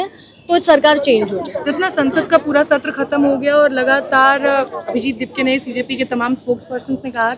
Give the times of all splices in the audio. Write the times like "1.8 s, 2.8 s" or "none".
none